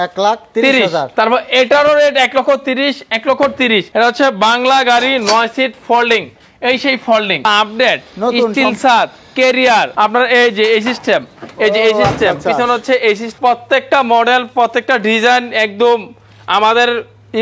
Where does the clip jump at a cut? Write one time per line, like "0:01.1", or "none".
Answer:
0:03.9
0:07.5
0:09.9
0:13.3

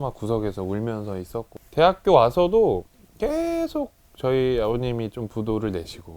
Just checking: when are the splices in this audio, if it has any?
0:01.6

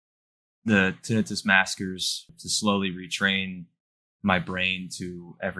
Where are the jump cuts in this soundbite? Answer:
0:02.3

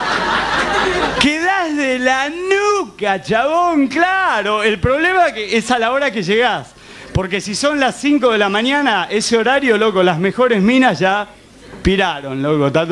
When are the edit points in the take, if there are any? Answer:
0:11.7

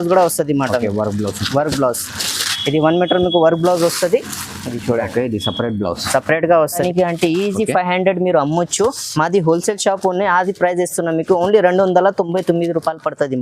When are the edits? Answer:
0:06.8

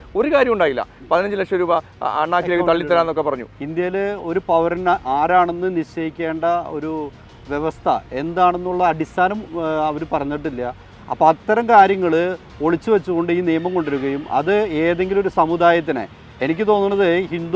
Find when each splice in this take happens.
0:03.5
0:10.9

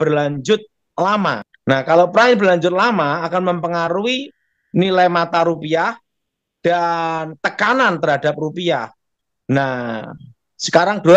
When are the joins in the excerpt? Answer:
0:01.5

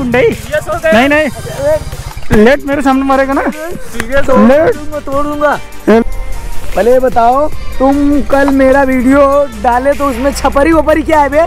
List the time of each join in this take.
0:06.0

